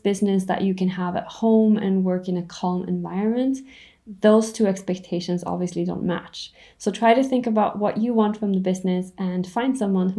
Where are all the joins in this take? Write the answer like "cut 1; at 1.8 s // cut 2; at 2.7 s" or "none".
none

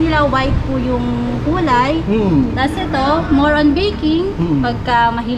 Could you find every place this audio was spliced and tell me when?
none

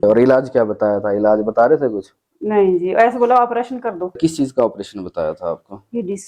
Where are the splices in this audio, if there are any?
none

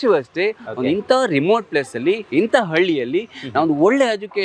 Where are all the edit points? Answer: none

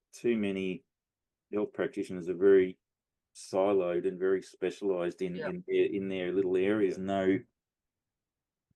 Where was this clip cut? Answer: cut 1; at 6.9 s

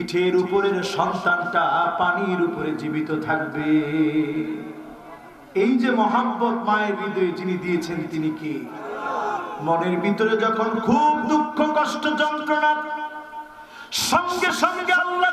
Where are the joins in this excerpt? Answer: cut 1; at 9.1 s

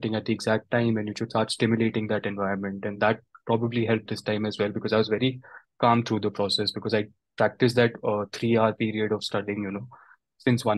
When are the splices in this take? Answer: none

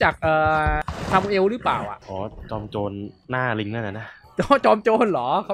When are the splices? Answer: cut 1; at 0.9 s // cut 2; at 2.0 s

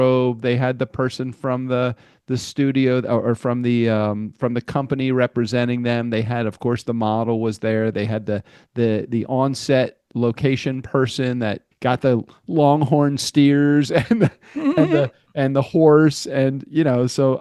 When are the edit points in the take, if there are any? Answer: cut 1; at 10.1 s // cut 2; at 11.7 s

